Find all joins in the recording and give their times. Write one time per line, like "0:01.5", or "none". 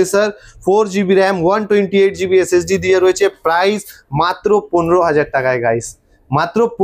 none